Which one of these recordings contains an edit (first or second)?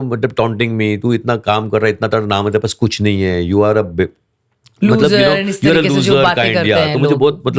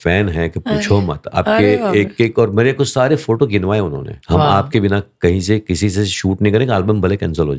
second